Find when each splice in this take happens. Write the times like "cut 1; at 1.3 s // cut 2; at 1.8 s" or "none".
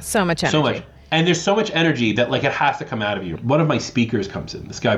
cut 1; at 3.4 s